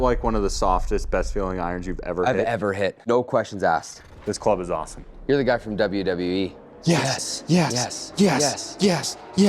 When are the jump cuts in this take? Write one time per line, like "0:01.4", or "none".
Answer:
0:03.0
0:04.0
0:06.7